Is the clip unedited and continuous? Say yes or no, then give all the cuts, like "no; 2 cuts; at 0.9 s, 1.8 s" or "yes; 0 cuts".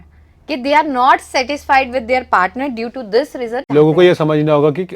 no; 1 cut; at 3.7 s